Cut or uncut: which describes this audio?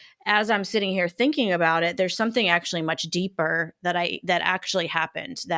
uncut